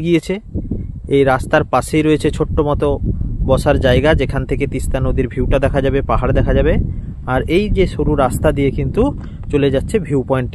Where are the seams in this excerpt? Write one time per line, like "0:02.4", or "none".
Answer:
none